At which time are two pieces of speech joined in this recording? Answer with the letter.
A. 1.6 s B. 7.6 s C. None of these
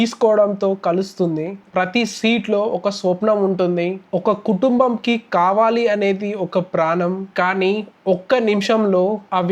A